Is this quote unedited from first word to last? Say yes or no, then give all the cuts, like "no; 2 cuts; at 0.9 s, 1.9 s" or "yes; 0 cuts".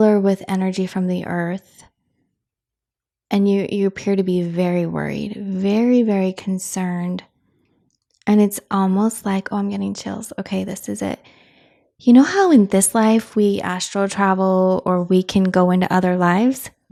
yes; 0 cuts